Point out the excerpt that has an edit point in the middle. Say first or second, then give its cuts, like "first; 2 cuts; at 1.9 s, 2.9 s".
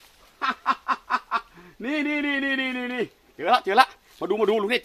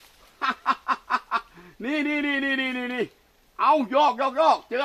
first; 1 cut; at 3.3 s